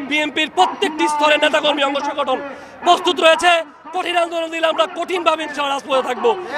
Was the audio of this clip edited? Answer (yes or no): no